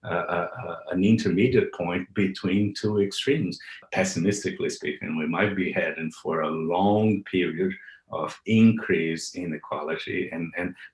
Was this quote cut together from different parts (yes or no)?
yes